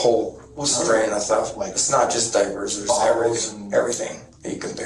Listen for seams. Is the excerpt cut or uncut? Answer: uncut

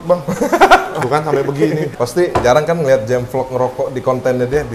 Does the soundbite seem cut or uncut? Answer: cut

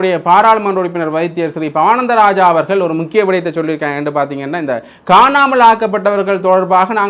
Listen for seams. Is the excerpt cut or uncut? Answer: uncut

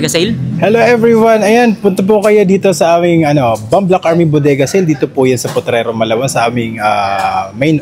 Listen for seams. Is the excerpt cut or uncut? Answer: uncut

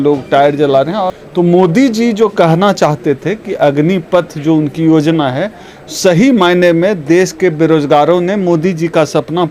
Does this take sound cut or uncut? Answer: cut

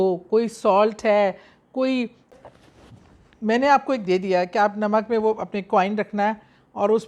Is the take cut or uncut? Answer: cut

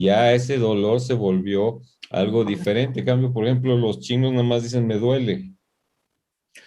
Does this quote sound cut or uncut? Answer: uncut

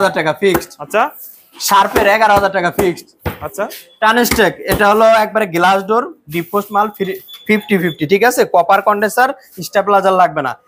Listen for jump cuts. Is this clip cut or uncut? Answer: uncut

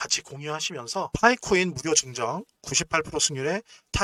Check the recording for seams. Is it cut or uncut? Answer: uncut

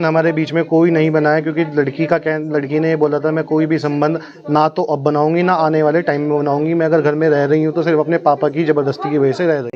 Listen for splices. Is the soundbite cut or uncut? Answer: uncut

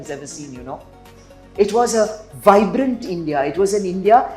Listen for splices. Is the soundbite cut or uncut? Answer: uncut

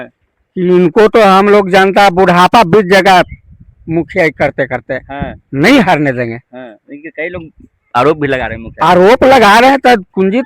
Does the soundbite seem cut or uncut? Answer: uncut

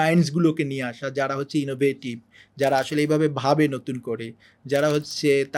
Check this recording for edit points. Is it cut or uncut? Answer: uncut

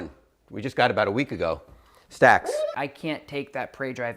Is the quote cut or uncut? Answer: cut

